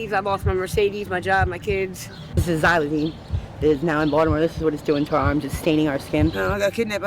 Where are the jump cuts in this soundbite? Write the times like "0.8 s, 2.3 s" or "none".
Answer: 2.4 s, 6.4 s